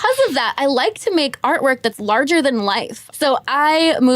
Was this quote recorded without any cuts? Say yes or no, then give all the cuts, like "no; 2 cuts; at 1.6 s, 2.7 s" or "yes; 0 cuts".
no; 1 cut; at 3.0 s